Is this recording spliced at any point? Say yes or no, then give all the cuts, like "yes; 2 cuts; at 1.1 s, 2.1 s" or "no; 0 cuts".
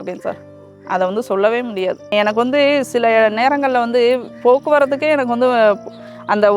yes; 1 cut; at 2.1 s